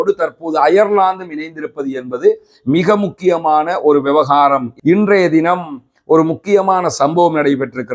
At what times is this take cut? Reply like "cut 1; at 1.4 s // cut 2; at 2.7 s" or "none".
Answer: cut 1; at 4.7 s